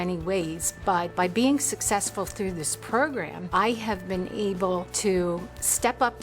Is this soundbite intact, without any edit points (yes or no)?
no